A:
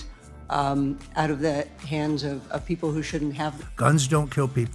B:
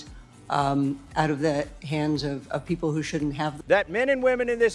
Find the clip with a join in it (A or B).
B